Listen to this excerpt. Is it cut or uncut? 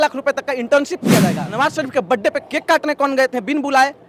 cut